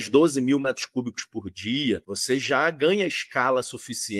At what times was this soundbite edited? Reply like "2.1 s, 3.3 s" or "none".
2.1 s